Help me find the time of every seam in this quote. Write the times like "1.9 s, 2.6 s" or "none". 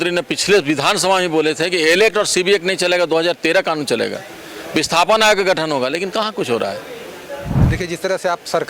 7.5 s

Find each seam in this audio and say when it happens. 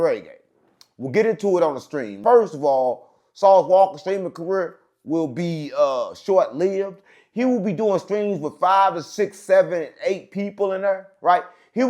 2.2 s

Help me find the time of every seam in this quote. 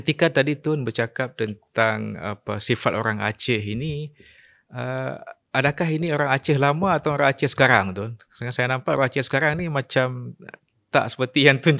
none

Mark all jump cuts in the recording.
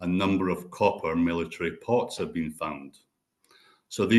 none

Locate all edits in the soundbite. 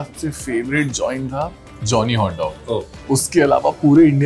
2.9 s

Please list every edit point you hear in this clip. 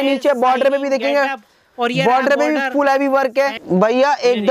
3.6 s

